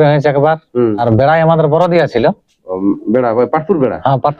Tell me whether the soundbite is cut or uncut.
cut